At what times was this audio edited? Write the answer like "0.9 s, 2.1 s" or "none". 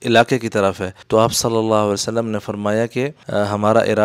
0.9 s, 3.2 s